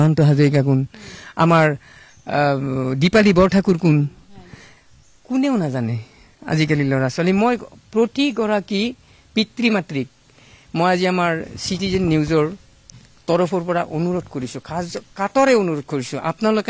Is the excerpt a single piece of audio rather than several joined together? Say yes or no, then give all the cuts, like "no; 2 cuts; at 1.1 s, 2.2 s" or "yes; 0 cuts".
yes; 0 cuts